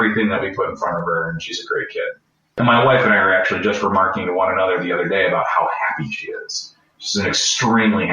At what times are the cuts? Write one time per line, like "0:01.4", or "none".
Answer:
0:02.5

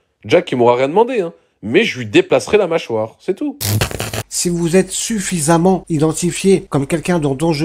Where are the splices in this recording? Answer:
0:03.9
0:05.8
0:06.7

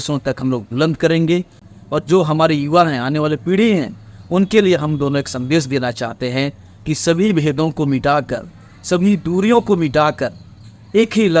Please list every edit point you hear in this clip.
0:01.6

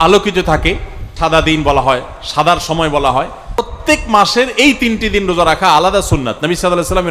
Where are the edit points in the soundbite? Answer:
0:01.0
0:03.7

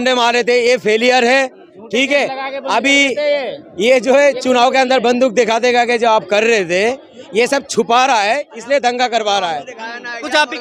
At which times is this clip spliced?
none

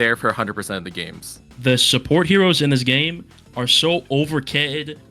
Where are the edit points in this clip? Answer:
0:01.4

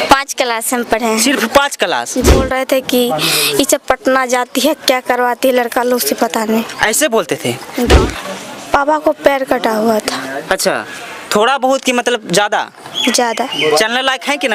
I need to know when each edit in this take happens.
0:02.4
0:07.9

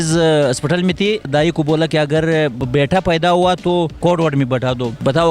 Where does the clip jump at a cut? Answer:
0:01.2
0:02.6

